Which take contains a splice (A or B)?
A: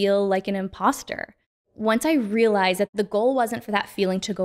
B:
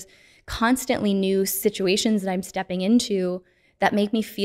A